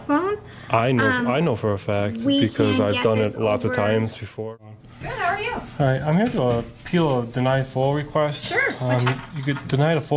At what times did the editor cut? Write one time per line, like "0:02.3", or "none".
0:04.7